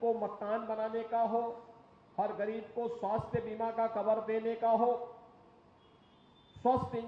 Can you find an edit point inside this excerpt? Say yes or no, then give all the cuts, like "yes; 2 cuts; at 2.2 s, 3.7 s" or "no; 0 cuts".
no; 0 cuts